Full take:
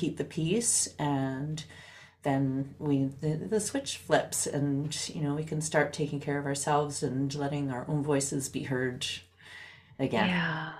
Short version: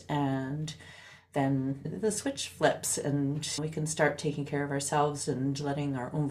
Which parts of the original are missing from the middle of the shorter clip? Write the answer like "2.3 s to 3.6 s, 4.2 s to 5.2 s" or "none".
2.8 s to 3.4 s, 5.1 s to 5.4 s

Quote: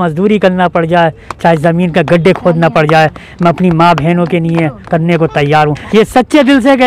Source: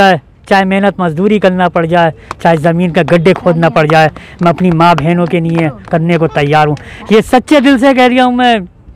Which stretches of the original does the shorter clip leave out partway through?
6.8 s to 7.0 s

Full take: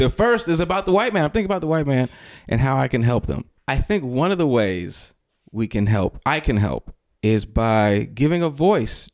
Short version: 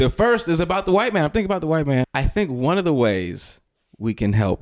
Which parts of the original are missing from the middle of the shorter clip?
2.2 s to 3.7 s

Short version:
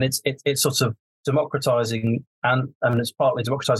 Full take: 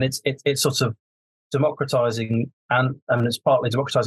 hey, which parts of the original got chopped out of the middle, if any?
1.1 s to 1.3 s

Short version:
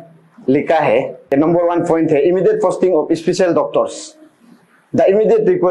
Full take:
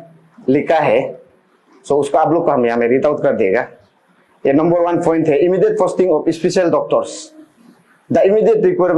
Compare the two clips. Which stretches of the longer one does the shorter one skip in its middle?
1.3 s to 4.5 s

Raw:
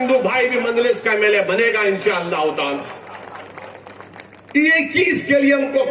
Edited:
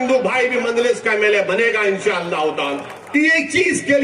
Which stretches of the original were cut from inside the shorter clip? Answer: 2.9 s to 4.4 s

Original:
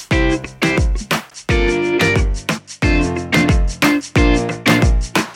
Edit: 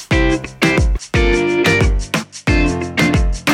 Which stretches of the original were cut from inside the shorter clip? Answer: 1.0 s to 1.3 s

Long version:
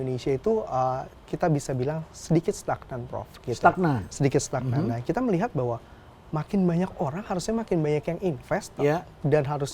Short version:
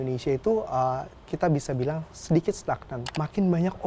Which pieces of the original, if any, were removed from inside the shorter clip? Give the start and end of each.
3.0 s to 6.1 s

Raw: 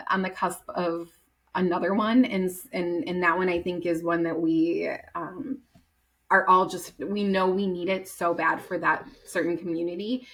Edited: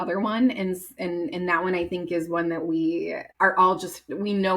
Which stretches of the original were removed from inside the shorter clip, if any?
5.0 s to 6.1 s

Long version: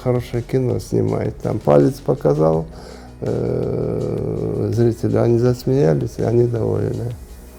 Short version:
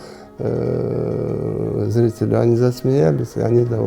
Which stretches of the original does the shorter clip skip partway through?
none

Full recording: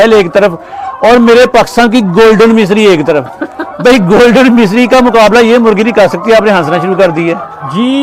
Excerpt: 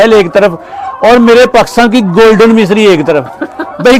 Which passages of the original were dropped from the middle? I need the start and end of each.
none

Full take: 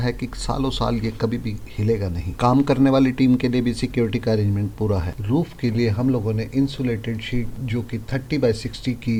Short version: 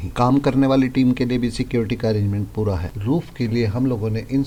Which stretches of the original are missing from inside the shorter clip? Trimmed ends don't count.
none

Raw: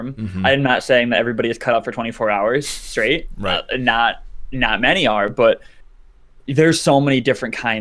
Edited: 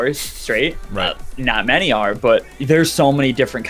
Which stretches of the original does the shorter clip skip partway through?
3.6 s to 4.3 s, 5.7 s to 6.4 s

